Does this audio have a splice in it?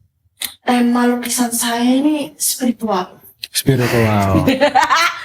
no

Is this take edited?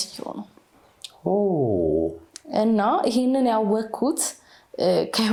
no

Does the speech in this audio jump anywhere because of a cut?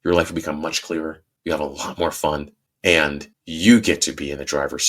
yes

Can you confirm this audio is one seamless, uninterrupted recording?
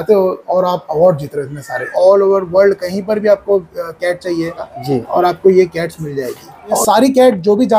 no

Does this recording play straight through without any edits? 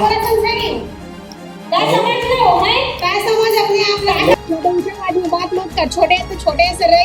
no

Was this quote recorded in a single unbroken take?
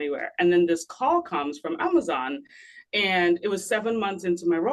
yes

